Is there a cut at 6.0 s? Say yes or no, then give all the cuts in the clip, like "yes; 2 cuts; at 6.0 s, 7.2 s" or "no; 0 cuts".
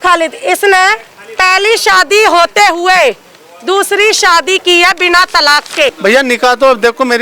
yes; 1 cut; at 6.0 s